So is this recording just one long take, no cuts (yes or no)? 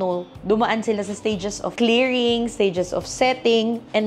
yes